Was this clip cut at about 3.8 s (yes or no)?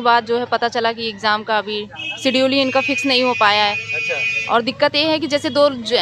no